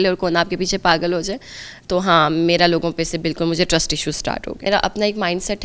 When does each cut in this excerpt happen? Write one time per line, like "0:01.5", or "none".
0:04.7